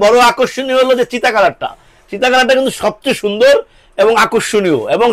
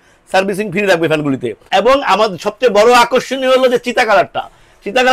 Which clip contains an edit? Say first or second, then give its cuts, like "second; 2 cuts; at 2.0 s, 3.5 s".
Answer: second; 1 cut; at 1.7 s